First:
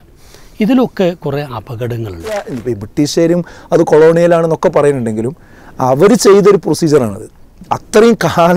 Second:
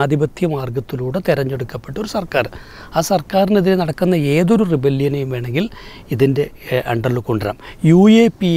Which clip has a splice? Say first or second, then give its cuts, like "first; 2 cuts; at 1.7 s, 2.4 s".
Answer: first; 1 cut; at 2.5 s